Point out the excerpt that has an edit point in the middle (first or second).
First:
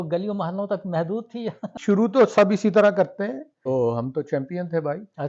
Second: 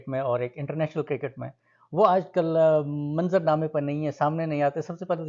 first